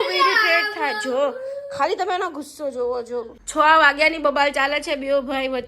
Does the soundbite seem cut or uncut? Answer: cut